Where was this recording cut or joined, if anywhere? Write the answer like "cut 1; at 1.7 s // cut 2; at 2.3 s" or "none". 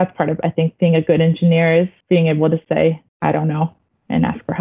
cut 1; at 2.0 s // cut 2; at 3.1 s